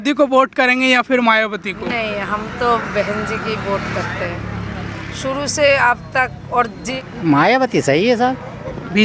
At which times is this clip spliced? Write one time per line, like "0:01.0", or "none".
0:06.9